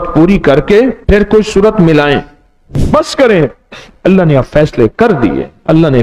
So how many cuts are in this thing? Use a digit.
2